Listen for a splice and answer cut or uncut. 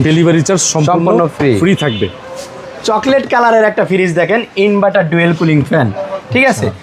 uncut